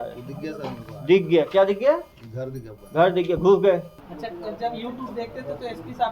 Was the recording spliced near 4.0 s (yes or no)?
yes